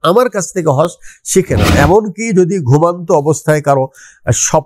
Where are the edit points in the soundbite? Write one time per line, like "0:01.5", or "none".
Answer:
0:01.7